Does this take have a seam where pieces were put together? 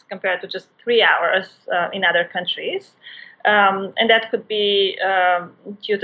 no; 0 cuts

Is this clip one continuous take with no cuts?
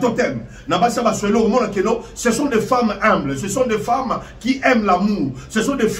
yes; 0 cuts

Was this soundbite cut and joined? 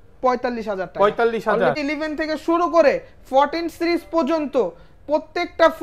yes; 1 cut; at 1.8 s

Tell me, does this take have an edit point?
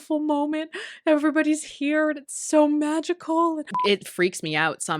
yes; 1 cut; at 3.7 s

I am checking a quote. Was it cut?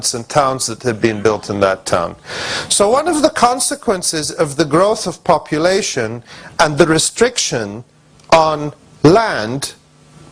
no; 0 cuts

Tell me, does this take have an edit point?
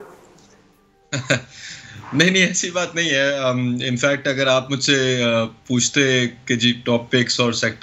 no; 0 cuts

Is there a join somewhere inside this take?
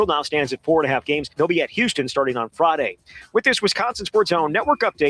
yes; 2 cuts; at 1.3 s, 4.0 s

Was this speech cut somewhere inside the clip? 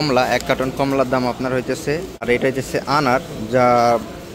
yes; 1 cut; at 2.2 s

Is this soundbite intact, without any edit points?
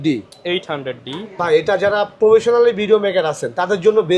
yes; 0 cuts

